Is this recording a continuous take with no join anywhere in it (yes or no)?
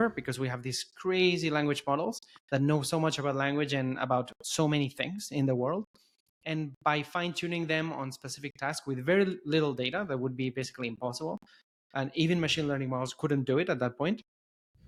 yes